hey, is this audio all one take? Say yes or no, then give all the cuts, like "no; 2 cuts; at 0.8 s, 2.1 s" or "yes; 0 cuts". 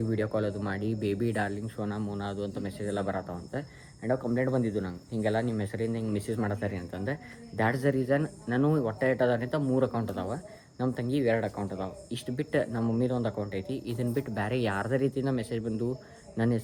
yes; 0 cuts